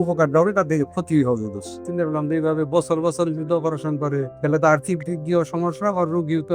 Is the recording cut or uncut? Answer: cut